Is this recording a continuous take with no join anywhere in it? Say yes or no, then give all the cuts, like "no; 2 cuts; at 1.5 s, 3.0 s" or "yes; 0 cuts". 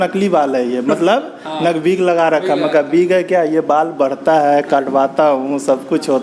yes; 0 cuts